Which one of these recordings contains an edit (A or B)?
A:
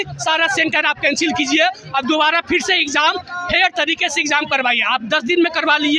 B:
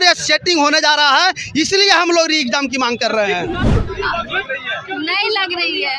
B